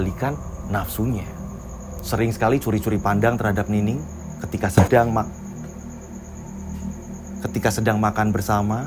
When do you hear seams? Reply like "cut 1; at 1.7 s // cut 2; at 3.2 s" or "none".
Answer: none